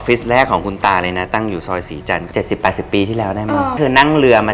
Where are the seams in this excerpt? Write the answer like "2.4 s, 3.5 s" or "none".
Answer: none